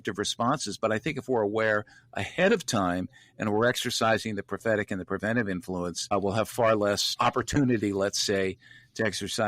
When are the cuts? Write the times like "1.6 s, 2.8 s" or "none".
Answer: 6.1 s, 7.1 s